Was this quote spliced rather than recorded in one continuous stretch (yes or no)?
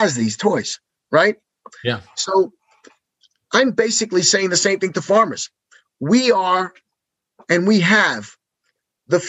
no